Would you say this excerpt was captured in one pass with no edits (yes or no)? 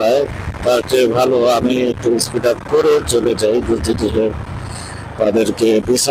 yes